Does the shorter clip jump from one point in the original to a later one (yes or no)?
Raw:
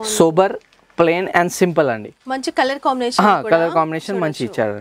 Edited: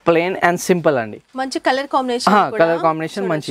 no